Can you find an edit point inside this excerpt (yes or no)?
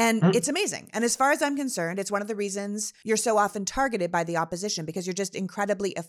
yes